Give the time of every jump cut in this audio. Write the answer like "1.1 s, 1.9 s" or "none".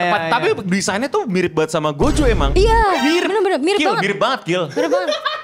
2.5 s